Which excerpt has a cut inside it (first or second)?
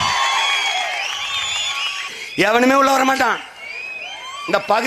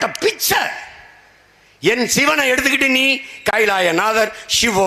first